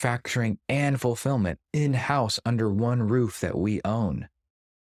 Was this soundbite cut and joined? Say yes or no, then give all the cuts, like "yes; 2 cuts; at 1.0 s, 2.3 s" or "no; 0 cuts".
no; 0 cuts